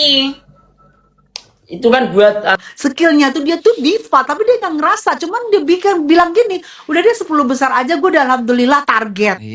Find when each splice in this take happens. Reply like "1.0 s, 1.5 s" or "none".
2.6 s